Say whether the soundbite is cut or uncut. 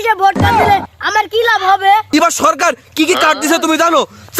cut